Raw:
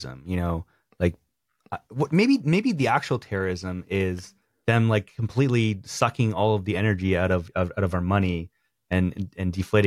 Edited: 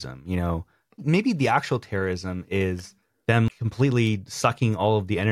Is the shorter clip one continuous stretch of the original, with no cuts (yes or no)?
no